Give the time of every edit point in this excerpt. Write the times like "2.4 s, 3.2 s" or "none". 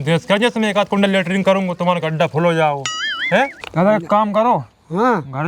3.6 s